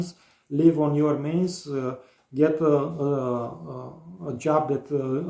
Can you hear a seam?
no; 0 cuts

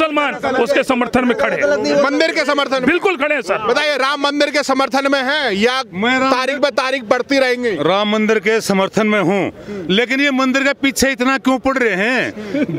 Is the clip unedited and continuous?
yes; 0 cuts

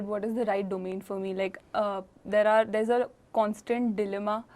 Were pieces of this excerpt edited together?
no; 0 cuts

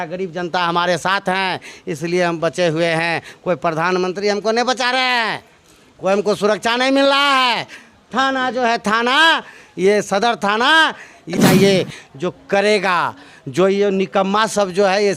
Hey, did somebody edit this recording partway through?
yes; 1 cut; at 11.3 s

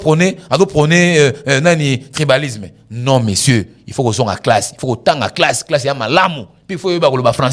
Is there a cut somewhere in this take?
no; 0 cuts

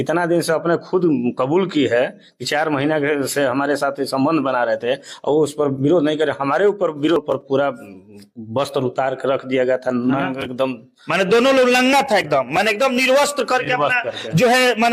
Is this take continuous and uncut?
no; 1 cut; at 7.2 s

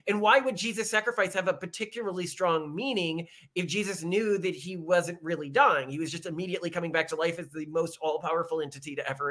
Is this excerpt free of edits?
yes; 0 cuts

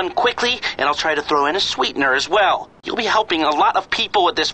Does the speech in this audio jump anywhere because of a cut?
yes; 1 cut; at 2.7 s

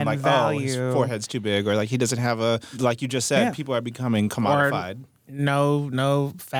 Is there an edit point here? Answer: yes; 1 cut; at 2.8 s

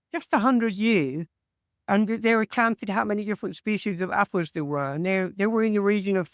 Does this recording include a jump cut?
no; 0 cuts

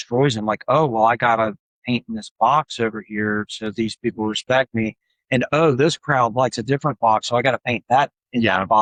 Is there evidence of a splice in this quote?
no; 0 cuts

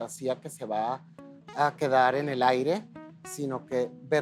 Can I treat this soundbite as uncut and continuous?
yes; 0 cuts

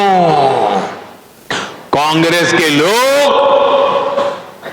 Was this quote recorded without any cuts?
yes; 0 cuts

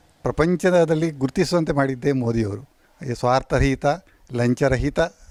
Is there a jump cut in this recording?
no; 0 cuts

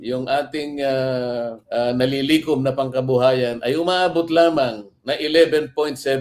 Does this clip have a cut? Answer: no; 0 cuts

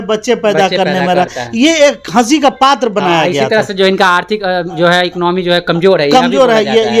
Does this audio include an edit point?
no; 0 cuts

